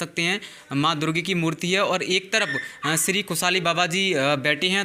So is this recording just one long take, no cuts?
yes; 0 cuts

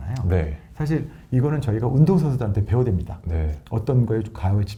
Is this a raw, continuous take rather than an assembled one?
yes; 0 cuts

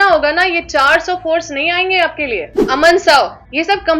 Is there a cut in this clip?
yes; 1 cut; at 2.6 s

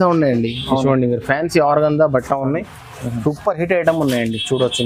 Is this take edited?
no; 0 cuts

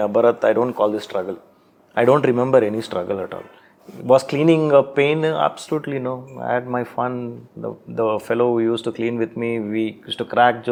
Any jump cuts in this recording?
no; 0 cuts

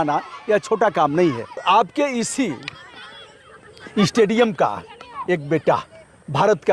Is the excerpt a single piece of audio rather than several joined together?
no; 1 cut; at 1.6 s

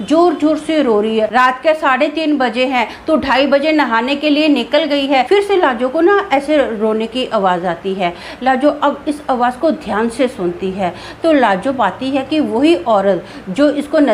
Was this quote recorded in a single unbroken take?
no; 2 cuts; at 1.3 s, 5.3 s

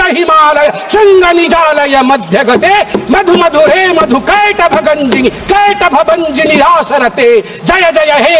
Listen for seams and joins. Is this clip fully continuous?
yes; 0 cuts

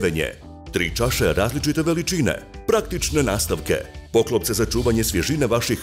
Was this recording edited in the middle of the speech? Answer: no; 0 cuts

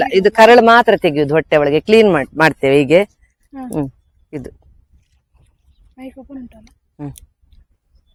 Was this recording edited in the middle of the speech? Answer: no; 0 cuts

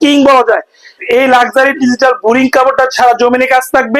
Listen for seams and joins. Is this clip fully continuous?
no; 1 cut; at 0.9 s

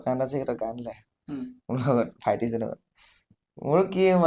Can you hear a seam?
no; 0 cuts

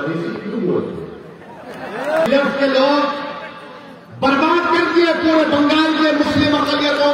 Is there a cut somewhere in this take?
yes; 1 cut; at 2.3 s

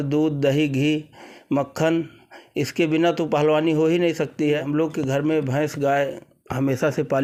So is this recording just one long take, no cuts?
yes; 0 cuts

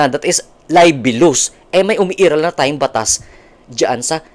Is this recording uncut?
yes; 0 cuts

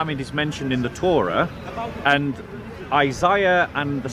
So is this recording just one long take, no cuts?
yes; 0 cuts

